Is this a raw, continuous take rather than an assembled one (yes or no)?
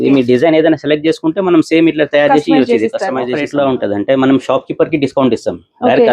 no